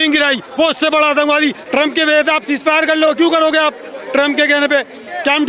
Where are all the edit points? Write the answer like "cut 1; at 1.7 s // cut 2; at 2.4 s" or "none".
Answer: cut 1; at 1.6 s